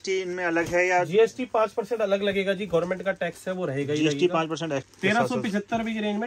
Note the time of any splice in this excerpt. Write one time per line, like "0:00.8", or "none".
0:04.9